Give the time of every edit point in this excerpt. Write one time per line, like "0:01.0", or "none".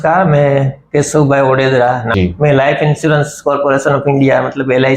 0:02.1